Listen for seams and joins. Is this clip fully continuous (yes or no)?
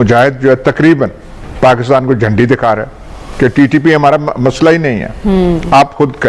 yes